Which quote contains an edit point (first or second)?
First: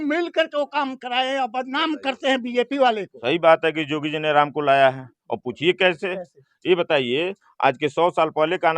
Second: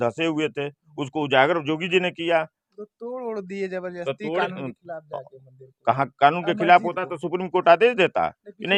first